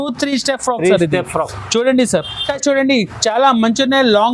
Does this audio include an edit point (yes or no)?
yes